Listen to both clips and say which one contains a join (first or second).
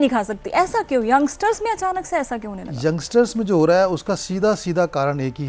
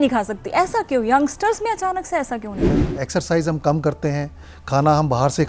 second